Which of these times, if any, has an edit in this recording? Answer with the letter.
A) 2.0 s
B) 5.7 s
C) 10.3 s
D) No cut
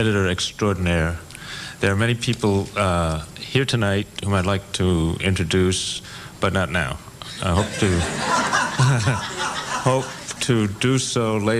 B